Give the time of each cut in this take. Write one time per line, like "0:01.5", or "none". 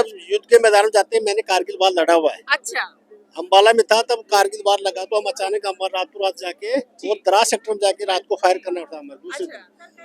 none